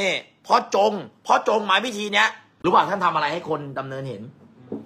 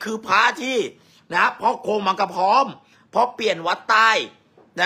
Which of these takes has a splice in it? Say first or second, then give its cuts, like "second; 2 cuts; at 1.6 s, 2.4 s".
first; 1 cut; at 2.4 s